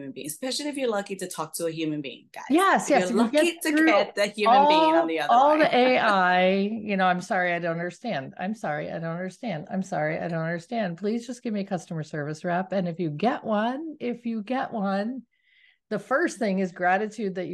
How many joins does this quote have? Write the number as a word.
zero